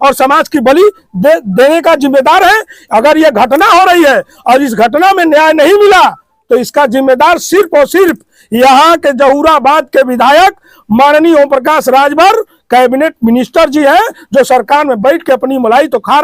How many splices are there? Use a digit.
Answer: 0